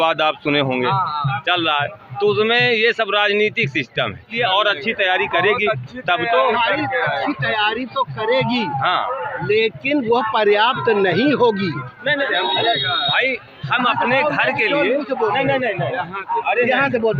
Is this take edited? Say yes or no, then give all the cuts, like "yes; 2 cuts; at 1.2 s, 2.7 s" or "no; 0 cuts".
yes; 2 cuts; at 4.3 s, 12.3 s